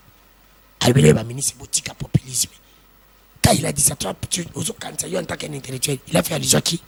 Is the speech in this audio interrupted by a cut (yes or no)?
no